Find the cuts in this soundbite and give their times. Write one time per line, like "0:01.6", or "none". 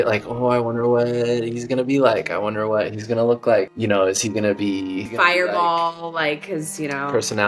0:03.7
0:05.1